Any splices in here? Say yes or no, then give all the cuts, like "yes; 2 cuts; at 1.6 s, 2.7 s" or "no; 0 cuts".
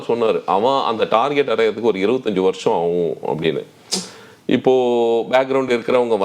no; 0 cuts